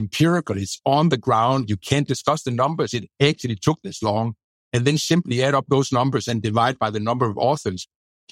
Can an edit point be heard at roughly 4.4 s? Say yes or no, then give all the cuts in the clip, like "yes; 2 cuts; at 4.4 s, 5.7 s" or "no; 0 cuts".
no; 0 cuts